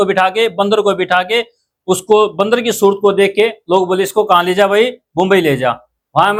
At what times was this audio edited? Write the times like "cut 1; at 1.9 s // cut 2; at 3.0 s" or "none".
none